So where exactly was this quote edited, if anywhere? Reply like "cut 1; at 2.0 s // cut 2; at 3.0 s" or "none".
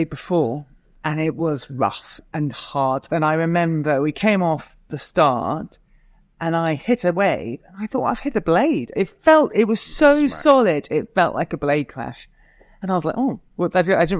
cut 1; at 0.9 s